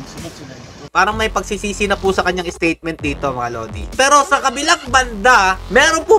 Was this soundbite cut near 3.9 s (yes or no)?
yes